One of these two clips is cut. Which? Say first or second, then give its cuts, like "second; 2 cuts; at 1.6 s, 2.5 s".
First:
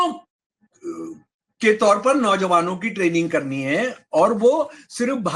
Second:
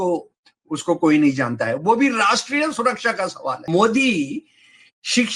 second; 1 cut; at 3.6 s